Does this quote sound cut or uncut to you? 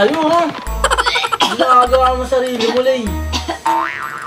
uncut